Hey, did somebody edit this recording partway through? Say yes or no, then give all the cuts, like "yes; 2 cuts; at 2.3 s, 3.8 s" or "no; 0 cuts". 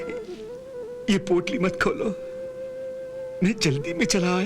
yes; 1 cut; at 3.3 s